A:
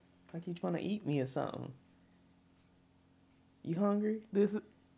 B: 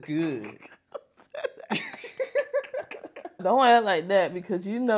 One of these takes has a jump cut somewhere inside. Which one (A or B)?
B